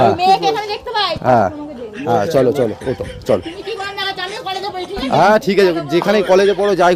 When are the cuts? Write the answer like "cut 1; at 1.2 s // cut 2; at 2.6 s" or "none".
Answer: none